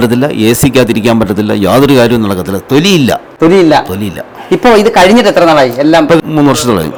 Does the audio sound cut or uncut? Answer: uncut